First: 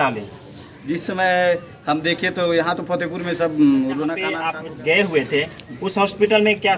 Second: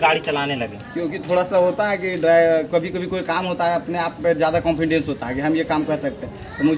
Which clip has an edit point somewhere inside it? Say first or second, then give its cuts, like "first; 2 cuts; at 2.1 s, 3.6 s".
first; 1 cut; at 4.5 s